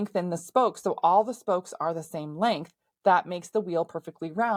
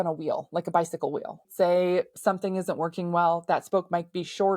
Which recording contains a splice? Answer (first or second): second